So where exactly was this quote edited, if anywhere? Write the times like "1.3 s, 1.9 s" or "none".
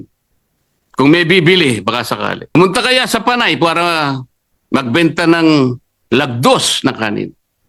2.5 s